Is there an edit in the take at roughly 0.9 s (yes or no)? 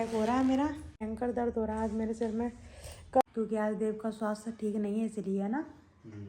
yes